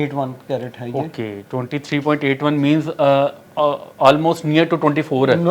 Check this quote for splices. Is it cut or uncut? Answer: uncut